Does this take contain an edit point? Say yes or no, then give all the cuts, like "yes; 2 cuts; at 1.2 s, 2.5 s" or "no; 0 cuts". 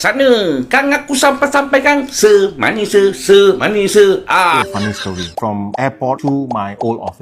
yes; 1 cut; at 4.6 s